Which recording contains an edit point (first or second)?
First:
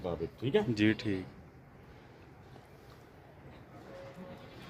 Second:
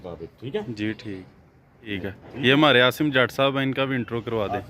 second